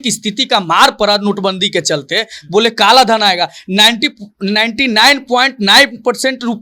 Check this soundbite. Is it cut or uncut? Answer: uncut